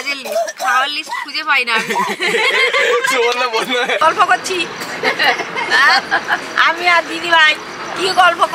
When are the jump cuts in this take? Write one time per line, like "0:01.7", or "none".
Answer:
0:04.0